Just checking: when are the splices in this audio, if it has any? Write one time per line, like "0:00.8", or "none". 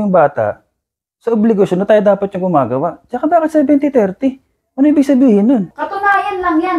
0:05.8